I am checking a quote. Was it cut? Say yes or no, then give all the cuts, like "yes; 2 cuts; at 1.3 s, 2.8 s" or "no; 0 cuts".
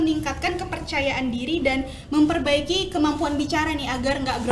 no; 0 cuts